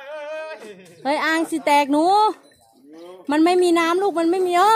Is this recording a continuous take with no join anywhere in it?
yes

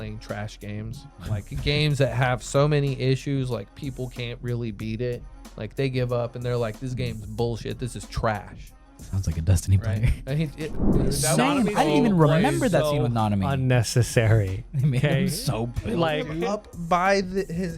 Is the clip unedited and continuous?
no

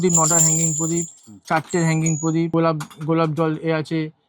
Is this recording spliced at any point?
yes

